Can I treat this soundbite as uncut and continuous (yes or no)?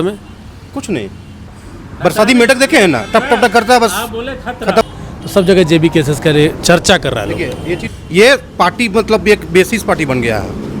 no